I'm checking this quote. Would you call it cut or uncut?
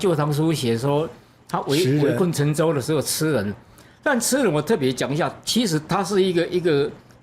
uncut